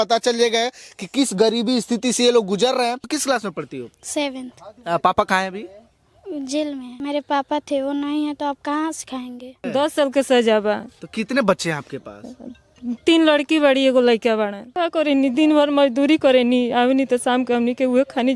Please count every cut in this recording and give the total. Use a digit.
4